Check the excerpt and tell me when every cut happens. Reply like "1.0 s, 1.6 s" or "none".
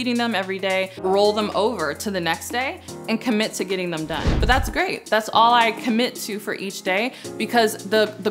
1.0 s, 4.3 s

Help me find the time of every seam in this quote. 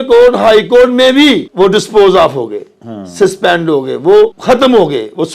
1.5 s, 4.4 s

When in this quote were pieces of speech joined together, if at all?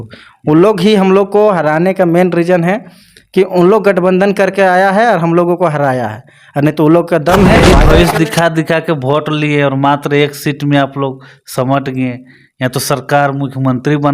7.6 s

